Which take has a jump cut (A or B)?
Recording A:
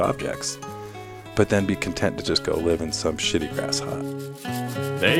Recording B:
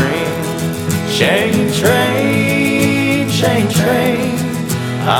A